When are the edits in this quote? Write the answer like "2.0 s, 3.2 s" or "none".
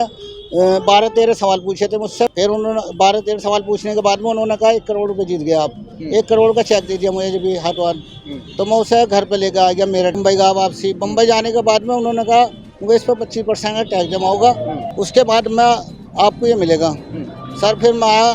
2.3 s, 10.2 s, 14.8 s